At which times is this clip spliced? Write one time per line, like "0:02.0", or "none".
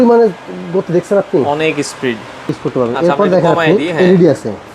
0:02.6